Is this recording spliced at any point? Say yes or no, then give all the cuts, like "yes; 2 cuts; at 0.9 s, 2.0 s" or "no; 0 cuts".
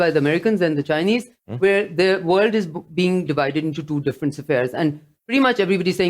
yes; 1 cut; at 3.3 s